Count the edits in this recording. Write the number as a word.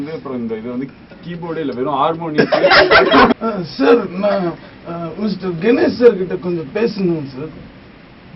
one